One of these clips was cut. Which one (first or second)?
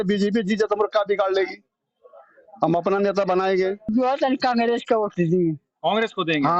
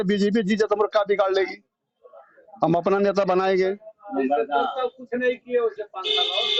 first